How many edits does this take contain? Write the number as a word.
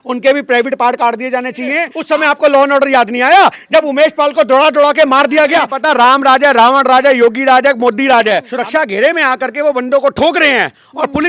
three